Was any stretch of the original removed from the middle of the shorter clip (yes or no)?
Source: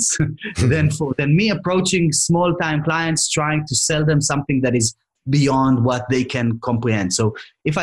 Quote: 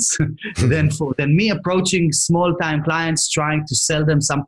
no